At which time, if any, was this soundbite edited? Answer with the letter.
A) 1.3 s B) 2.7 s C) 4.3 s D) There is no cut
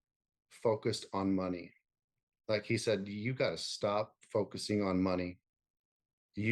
D